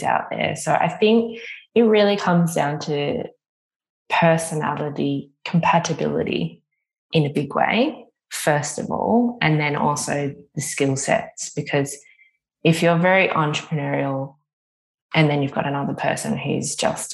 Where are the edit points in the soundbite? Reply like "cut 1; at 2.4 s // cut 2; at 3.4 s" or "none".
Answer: none

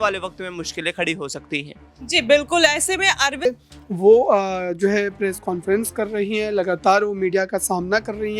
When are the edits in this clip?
cut 1; at 3.4 s

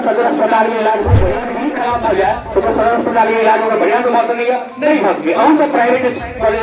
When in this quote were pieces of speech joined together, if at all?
cut 1; at 1.4 s

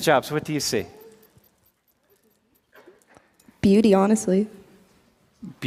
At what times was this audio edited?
none

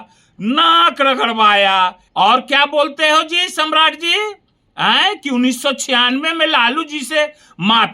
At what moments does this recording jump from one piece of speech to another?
cut 1; at 2.0 s

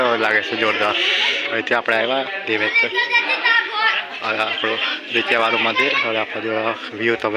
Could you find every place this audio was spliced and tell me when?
none

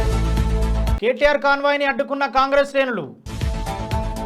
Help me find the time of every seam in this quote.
cut 1; at 0.9 s

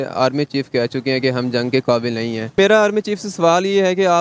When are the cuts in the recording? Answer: cut 1; at 2.5 s

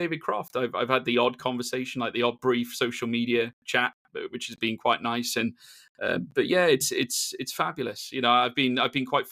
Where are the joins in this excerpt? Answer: none

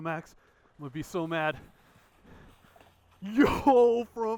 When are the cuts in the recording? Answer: none

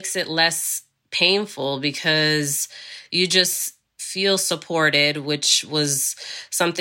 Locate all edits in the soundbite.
cut 1; at 4.1 s

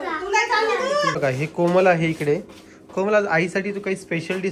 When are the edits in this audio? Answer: cut 1; at 1.1 s

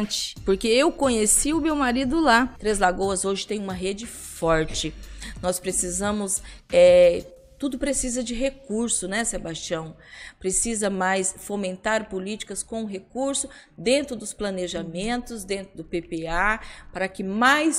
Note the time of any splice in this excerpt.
cut 1; at 2.6 s

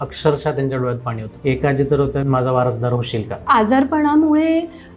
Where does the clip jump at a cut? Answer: cut 1; at 1.3 s // cut 2; at 2.2 s // cut 3; at 3.4 s

